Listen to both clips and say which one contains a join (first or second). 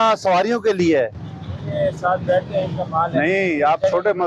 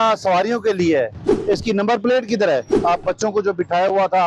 second